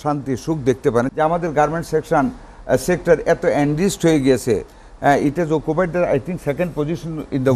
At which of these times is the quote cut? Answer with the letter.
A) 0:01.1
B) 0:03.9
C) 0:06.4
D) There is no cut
A